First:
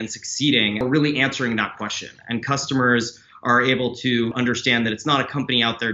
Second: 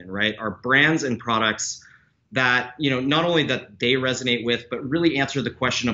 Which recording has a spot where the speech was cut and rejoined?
first; 2 cuts; at 0.8 s, 4.3 s

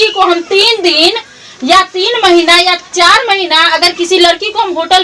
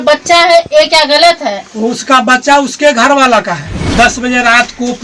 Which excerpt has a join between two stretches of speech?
second; 1 cut; at 3.9 s

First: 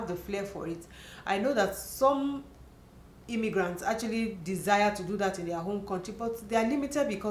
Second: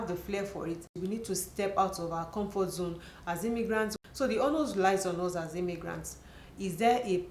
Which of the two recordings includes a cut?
second; 2 cuts; at 0.9 s, 3.9 s

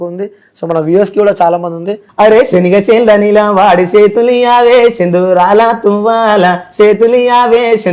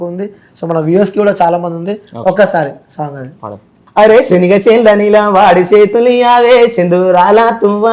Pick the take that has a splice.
first; 1 cut; at 2.0 s

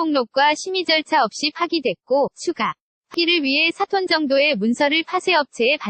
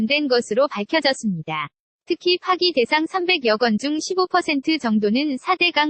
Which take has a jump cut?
first; 1 cut; at 3.1 s

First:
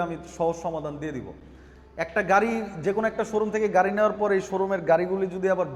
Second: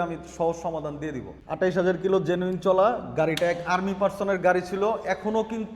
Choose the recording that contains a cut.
second; 1 cut; at 1.3 s

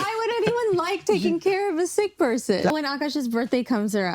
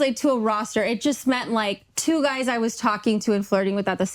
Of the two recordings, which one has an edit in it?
first; 1 cut; at 2.7 s

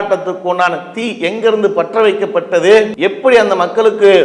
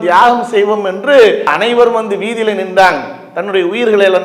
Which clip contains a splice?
first; 1 cut; at 2.9 s

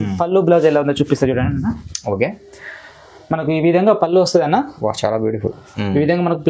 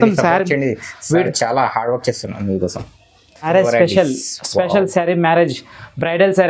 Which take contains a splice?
second; 1 cut; at 3.5 s

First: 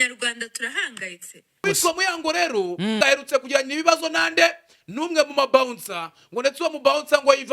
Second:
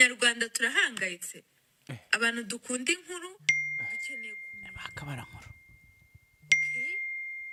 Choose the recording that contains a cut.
first; 2 cuts; at 1.7 s, 3.0 s

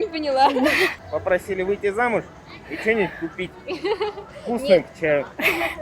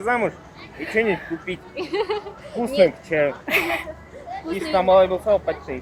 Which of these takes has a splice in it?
first; 1 cut; at 0.9 s

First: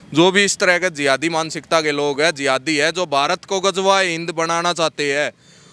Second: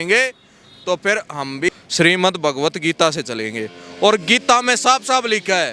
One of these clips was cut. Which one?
second; 1 cut; at 1.7 s

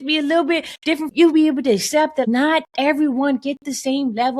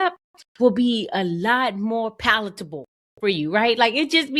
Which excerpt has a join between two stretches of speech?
first; 2 cuts; at 1.1 s, 2.2 s

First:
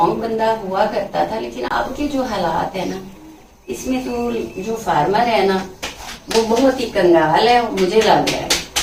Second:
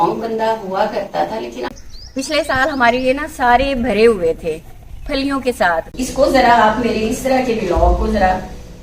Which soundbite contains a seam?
second; 2 cuts; at 1.7 s, 5.9 s

